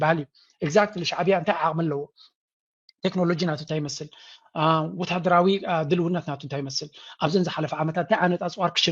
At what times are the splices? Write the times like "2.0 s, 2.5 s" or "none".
none